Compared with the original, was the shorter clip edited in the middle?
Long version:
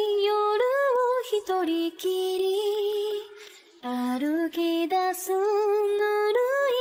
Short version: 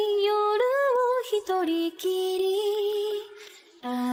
no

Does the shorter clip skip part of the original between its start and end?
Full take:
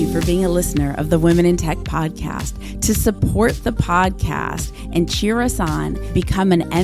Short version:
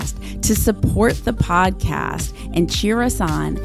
no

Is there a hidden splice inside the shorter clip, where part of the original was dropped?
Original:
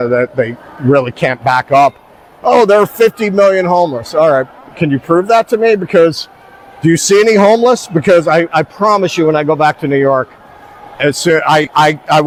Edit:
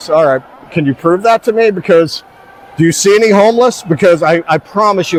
no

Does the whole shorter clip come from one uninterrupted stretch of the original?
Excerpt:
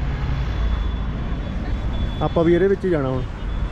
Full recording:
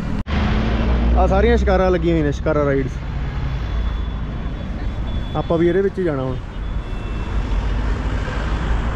yes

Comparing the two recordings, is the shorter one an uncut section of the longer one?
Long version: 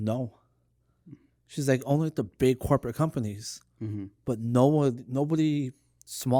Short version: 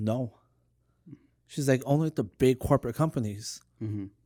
yes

